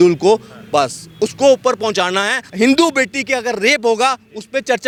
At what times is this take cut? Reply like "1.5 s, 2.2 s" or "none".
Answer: none